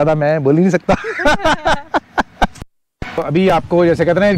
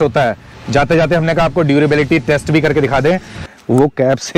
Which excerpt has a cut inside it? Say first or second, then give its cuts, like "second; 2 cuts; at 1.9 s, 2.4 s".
second; 1 cut; at 3.5 s